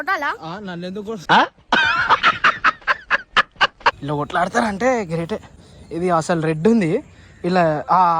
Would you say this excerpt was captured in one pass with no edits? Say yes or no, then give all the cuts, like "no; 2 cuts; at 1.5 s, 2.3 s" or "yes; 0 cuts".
no; 1 cut; at 4.0 s